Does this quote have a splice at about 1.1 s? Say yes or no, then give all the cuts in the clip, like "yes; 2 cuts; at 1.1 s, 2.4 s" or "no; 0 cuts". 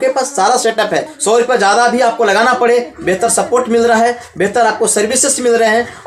yes; 1 cut; at 1.1 s